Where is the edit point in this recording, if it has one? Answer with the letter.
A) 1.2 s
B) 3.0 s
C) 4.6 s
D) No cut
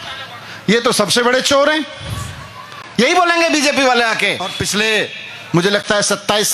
C